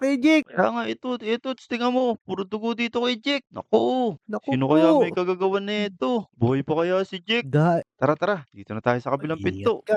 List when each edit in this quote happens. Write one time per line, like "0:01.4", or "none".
0:07.9